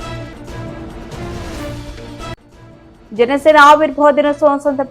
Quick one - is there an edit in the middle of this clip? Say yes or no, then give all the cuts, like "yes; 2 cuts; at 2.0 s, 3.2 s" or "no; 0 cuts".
no; 0 cuts